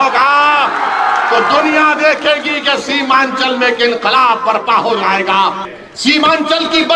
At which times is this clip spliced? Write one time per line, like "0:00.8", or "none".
0:05.6

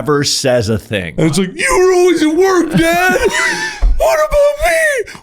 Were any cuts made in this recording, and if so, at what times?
0:01.0

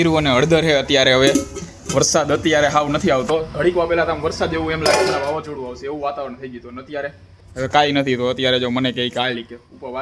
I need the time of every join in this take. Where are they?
none

